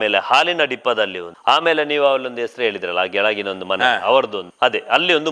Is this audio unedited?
no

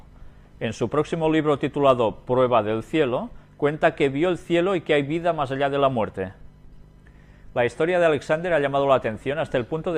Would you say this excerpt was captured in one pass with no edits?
no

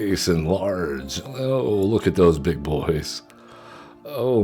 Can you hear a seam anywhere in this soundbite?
no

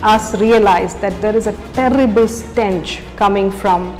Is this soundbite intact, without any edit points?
yes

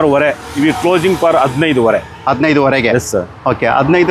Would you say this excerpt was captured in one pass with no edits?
yes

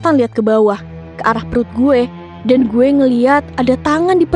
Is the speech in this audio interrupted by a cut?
no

